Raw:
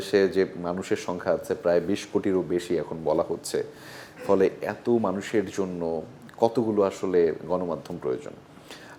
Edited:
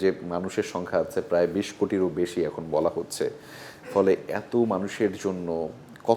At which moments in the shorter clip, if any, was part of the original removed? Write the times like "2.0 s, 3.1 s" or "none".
none